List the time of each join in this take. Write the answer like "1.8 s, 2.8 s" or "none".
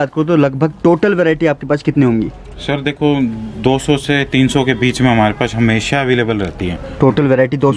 none